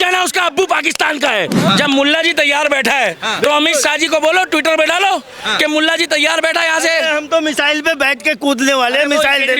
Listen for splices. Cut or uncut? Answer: cut